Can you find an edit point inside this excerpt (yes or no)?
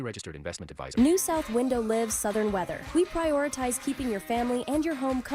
yes